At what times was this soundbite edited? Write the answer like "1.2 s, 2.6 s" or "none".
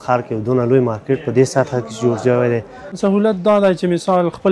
3.0 s